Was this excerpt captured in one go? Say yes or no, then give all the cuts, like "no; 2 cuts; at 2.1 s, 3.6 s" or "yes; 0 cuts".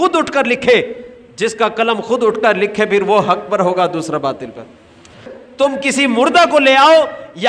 no; 1 cut; at 5.2 s